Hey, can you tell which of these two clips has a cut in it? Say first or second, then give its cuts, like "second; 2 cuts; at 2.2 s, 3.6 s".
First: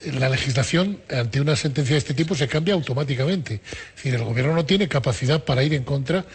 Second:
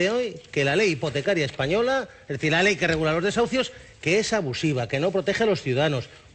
first; 1 cut; at 3.5 s